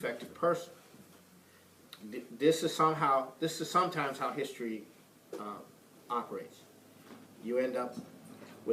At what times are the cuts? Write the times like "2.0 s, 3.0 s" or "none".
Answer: 6.4 s